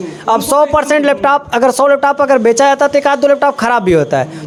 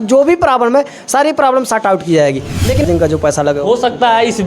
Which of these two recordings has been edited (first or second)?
second